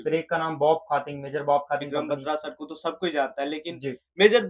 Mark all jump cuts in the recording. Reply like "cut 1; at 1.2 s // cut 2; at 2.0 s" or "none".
cut 1; at 1.9 s

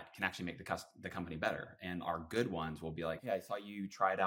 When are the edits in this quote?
cut 1; at 3.2 s

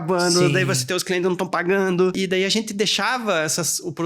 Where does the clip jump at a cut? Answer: cut 1; at 2.1 s

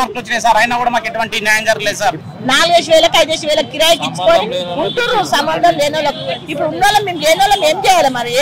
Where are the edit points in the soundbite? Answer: cut 1; at 2.3 s

